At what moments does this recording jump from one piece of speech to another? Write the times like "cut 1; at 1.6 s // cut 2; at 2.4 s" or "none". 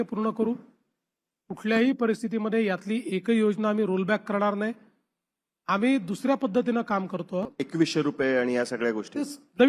cut 1; at 7.6 s